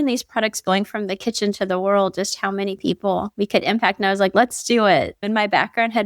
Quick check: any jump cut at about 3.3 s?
yes; 1 cut; at 3.3 s

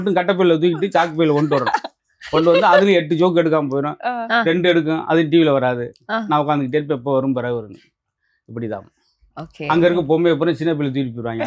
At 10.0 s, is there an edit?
no; 0 cuts

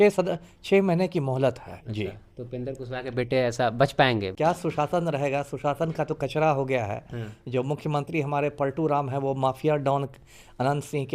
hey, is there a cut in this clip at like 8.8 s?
no; 1 cut; at 4.3 s

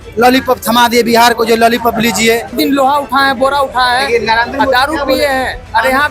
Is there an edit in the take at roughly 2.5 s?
yes; 1 cut; at 2.5 s

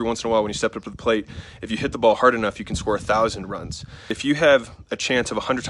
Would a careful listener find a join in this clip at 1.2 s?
no; 1 cut; at 4.1 s

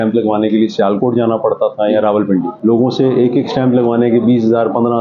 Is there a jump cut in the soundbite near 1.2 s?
no; 1 cut; at 2.5 s

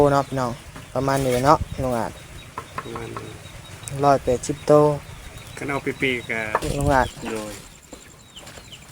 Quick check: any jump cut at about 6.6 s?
yes; 1 cut; at 6.6 s

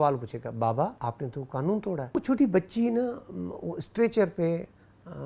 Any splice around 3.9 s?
no; 2 cuts; at 1.0 s, 2.1 s

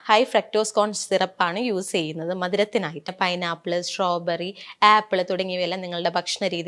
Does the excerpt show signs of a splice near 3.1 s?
yes; 1 cut; at 3.1 s

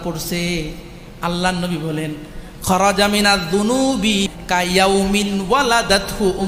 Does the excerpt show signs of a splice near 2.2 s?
no; 1 cut; at 4.4 s

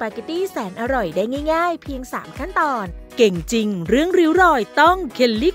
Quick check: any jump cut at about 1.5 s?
no; 1 cut; at 3.1 s

